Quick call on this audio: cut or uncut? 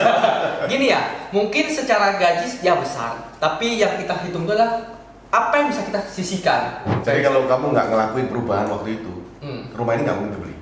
cut